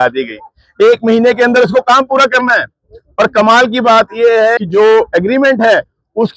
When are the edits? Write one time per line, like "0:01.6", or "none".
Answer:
0:04.5